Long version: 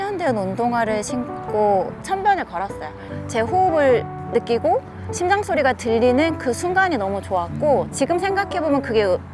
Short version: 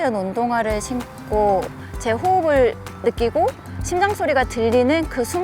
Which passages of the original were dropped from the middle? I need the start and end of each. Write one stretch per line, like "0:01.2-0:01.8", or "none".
0:02.0-0:03.0